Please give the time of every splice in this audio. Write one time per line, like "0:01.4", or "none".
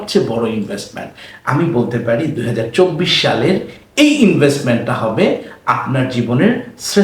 none